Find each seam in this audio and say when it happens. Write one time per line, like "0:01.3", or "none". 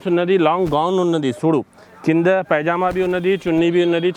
none